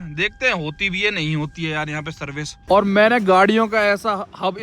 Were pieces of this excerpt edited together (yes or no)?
yes